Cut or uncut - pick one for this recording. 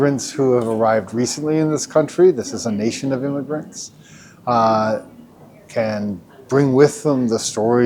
uncut